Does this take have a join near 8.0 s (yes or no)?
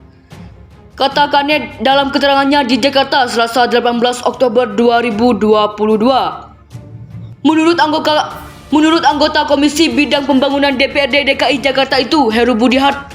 no